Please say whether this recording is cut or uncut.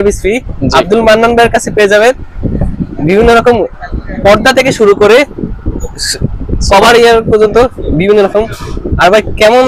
uncut